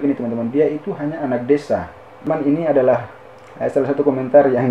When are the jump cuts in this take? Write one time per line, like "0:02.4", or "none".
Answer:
0:02.3